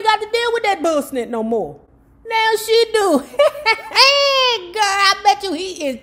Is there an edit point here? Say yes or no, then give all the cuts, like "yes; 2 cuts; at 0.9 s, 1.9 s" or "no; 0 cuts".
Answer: no; 0 cuts